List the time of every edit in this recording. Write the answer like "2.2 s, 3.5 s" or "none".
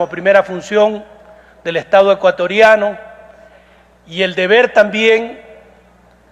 1.8 s